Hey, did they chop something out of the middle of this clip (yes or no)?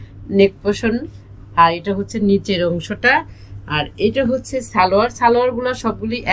no